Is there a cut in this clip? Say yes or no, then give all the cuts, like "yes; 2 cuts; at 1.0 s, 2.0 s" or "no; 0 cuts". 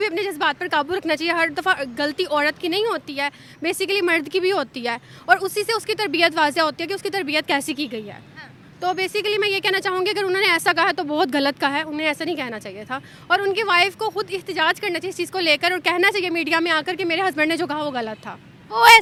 no; 0 cuts